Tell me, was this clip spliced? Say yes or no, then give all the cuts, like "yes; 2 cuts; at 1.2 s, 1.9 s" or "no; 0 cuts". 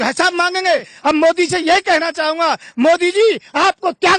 yes; 1 cut; at 0.9 s